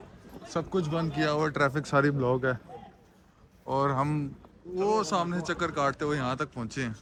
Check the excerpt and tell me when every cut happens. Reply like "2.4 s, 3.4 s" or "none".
none